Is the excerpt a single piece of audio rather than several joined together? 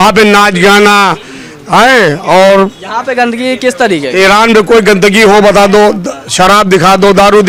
yes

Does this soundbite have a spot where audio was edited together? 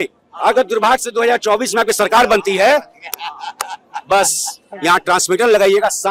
no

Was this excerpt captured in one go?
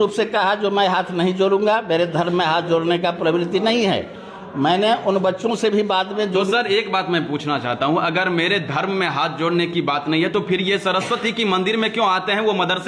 yes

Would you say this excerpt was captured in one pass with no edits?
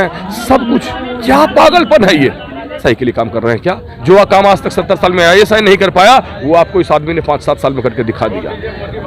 no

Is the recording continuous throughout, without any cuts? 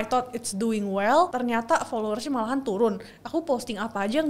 yes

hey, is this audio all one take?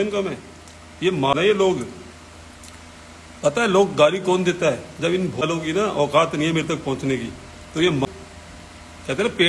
no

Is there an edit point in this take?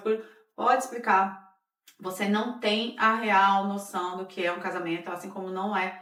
no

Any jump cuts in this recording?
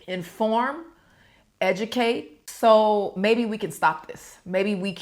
yes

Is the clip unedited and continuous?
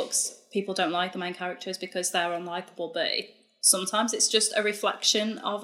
yes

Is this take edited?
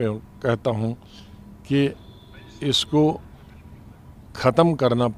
no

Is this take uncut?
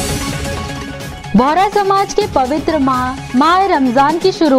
no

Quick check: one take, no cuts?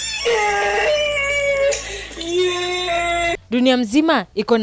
no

